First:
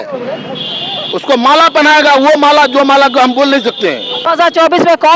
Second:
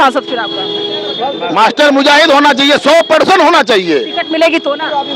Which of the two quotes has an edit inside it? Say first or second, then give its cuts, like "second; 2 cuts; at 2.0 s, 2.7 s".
first; 1 cut; at 4.3 s